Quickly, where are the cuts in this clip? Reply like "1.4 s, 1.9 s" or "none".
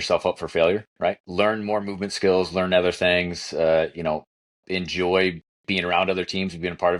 1.2 s